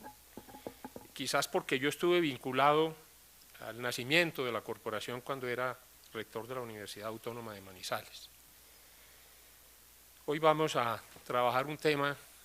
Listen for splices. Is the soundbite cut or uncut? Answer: cut